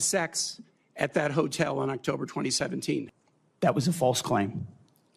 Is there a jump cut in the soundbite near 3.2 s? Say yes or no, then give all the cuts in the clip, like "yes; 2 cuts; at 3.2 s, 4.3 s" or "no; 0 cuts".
yes; 1 cut; at 3.2 s